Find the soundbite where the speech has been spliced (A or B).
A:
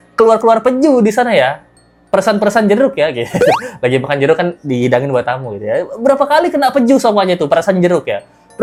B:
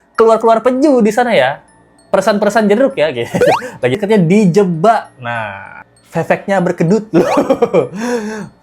B